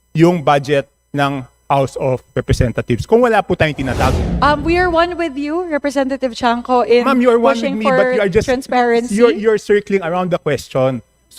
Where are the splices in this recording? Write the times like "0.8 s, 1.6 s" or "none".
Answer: 4.3 s